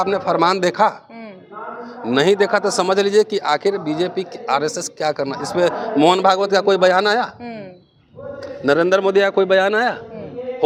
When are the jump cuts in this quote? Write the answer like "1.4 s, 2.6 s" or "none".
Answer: none

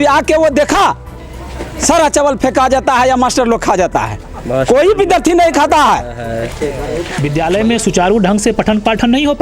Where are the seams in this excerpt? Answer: 7.1 s

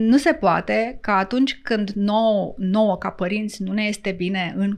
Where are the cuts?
none

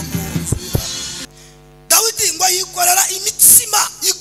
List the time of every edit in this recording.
1.2 s

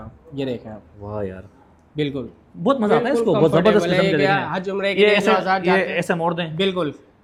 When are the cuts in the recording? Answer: none

